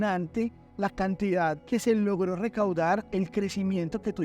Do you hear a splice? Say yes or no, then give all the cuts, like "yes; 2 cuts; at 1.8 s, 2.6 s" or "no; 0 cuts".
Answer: yes; 1 cut; at 1.6 s